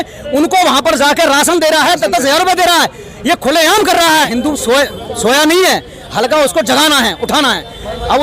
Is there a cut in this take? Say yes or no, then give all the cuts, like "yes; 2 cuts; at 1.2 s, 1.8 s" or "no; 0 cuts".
yes; 1 cut; at 4.3 s